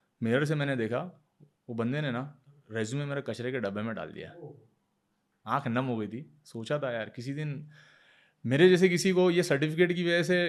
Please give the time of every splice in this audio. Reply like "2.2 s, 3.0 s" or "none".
none